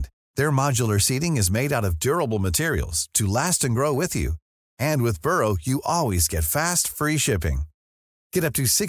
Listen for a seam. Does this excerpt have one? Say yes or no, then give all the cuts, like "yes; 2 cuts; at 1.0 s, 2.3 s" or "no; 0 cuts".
no; 0 cuts